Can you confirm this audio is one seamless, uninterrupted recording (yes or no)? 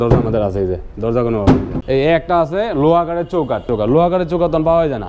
no